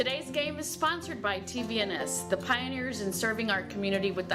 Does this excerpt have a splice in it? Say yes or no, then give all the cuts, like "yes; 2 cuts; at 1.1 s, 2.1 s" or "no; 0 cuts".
no; 0 cuts